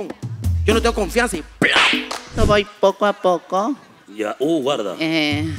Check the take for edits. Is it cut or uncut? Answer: cut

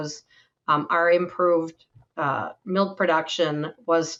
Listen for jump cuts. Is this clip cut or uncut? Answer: uncut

